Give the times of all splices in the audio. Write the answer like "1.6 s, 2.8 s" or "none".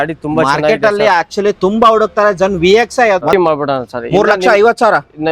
3.2 s